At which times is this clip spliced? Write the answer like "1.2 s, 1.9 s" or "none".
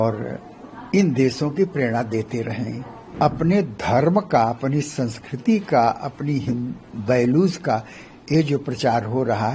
3.1 s